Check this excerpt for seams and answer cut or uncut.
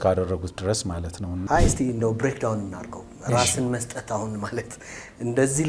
cut